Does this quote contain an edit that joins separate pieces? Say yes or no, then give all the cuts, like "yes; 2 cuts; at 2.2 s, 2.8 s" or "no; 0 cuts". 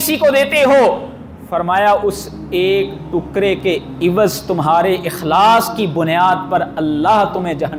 no; 0 cuts